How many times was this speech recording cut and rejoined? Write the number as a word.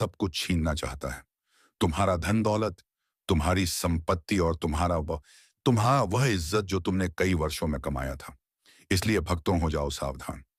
zero